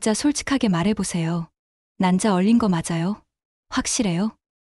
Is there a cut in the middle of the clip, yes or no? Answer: no